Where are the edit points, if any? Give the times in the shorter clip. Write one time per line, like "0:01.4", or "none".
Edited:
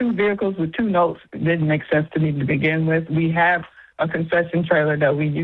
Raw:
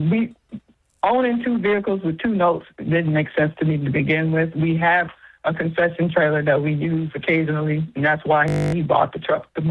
none